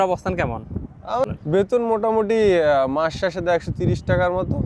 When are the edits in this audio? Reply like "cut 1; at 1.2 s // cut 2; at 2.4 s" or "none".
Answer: cut 1; at 1.2 s